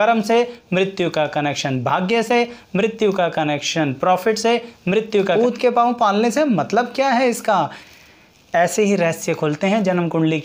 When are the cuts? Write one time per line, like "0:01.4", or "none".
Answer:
0:05.3
0:07.8